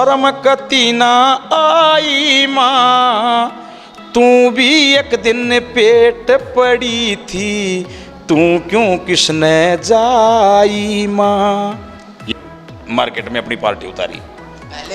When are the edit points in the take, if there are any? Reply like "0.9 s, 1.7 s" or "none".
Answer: 12.1 s